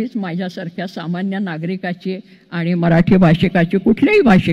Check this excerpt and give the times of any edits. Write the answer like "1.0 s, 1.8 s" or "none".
none

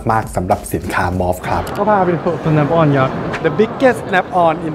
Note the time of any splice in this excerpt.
1.8 s

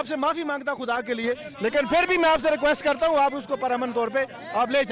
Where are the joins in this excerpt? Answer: none

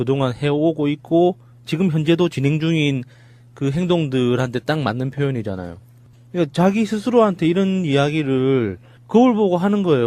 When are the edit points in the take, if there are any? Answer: none

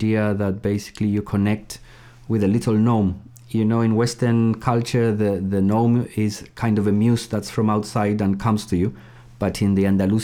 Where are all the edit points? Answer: none

